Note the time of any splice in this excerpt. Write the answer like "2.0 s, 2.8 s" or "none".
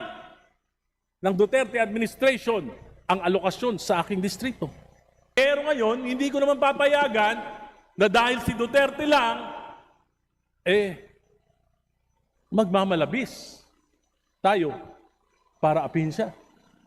5.4 s

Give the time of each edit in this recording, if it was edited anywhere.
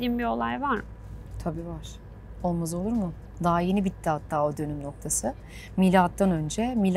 none

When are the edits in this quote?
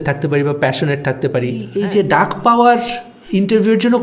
1.7 s

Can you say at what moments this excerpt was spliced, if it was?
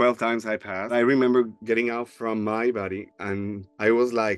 0.9 s

